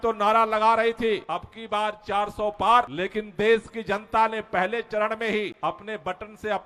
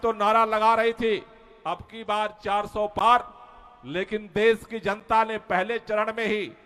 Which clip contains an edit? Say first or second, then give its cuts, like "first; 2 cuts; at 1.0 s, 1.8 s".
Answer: first; 3 cuts; at 1.2 s, 2.9 s, 5.5 s